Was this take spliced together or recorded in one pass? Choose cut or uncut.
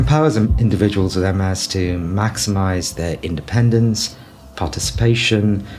uncut